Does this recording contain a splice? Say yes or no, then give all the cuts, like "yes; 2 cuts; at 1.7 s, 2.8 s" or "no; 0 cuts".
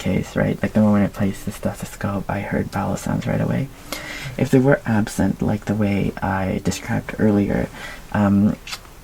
no; 0 cuts